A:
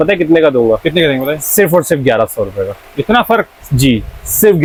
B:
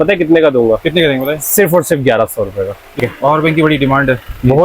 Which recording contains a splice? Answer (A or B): B